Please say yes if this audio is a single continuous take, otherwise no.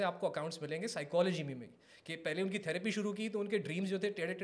yes